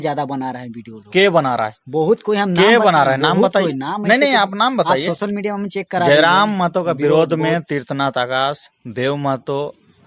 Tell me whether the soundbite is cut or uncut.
uncut